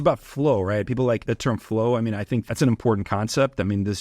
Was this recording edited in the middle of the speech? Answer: yes; 2 cuts; at 1.2 s, 2.5 s

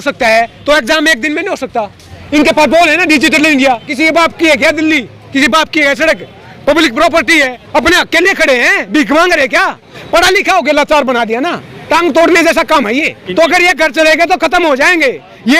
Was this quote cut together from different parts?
yes; 4 cuts; at 3.9 s, 7.6 s, 9.9 s, 13.2 s

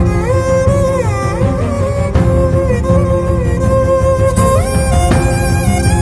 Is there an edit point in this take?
no; 0 cuts

